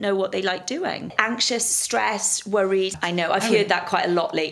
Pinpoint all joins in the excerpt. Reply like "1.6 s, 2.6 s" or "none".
1.1 s, 2.9 s